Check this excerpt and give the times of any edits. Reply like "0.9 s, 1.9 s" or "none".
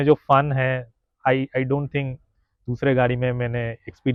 none